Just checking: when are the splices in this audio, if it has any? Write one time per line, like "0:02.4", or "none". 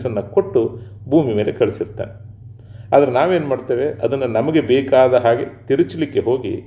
none